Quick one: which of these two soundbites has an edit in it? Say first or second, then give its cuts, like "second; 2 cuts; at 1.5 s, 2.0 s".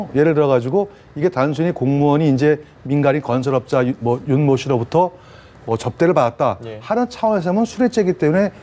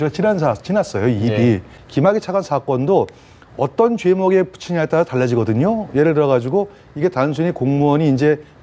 second; 1 cut; at 1.7 s